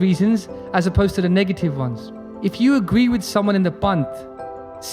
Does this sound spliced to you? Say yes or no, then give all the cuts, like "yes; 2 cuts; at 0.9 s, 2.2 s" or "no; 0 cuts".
yes; 1 cut; at 2.2 s